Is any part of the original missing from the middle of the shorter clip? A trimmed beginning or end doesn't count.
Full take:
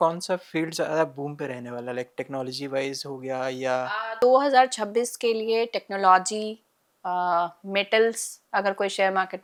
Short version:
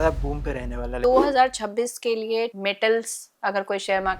yes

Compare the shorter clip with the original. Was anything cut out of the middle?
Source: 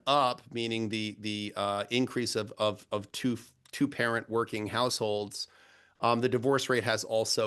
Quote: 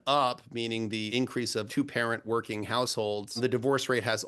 yes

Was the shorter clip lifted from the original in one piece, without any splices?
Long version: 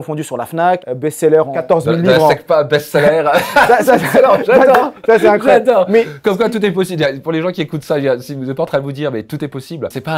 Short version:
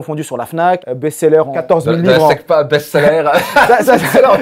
yes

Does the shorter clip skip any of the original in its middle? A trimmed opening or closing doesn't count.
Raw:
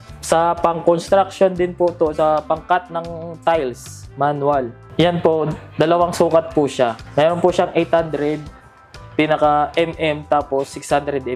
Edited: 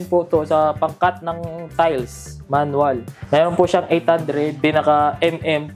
yes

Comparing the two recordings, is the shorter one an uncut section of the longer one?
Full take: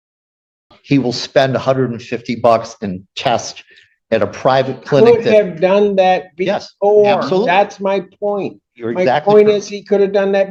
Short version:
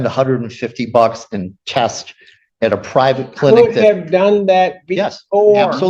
yes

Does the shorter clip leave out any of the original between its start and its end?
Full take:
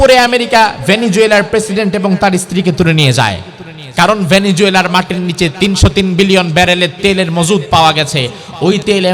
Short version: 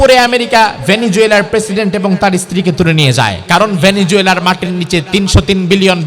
yes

